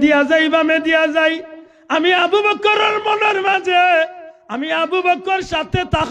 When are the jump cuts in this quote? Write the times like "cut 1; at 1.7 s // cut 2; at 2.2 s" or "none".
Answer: none